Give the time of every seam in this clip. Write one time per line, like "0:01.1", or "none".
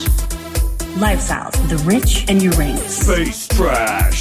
none

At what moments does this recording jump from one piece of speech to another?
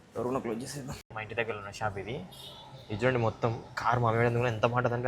0:01.0

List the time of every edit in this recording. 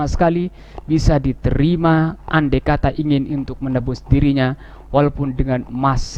none

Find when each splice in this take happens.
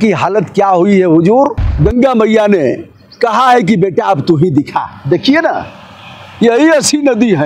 0:01.6

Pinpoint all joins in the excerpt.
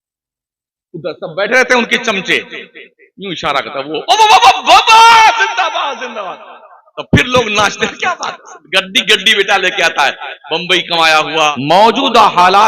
0:11.5

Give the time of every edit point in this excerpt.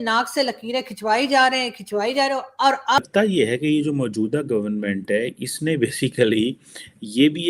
0:03.0

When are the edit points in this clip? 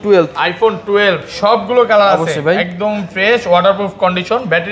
none

